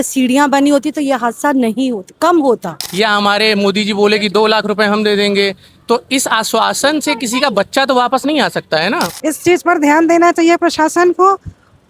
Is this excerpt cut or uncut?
cut